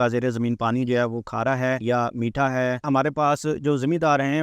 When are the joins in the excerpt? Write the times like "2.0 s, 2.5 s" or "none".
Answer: 1.8 s, 2.8 s